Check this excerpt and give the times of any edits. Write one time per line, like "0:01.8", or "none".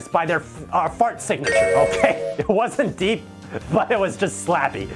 0:01.6